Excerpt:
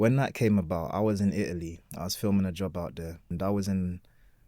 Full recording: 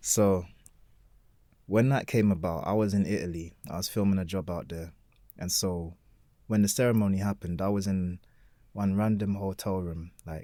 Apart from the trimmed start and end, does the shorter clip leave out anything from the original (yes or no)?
yes